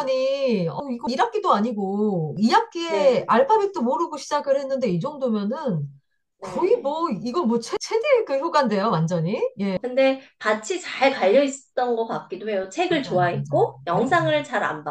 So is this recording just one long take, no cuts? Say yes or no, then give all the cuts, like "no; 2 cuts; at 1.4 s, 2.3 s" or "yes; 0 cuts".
yes; 0 cuts